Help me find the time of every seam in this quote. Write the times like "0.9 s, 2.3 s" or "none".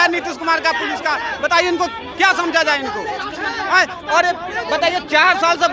none

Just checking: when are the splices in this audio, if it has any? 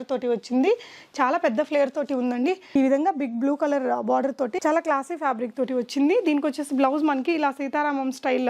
2.6 s

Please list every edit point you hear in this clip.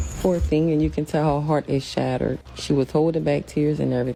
none

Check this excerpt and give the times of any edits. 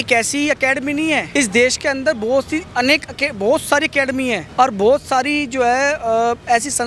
none

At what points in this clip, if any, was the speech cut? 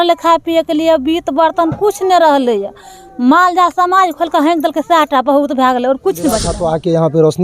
6.5 s

